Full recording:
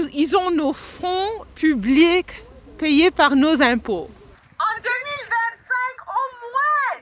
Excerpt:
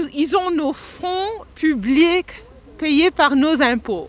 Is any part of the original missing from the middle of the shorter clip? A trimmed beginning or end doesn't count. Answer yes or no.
no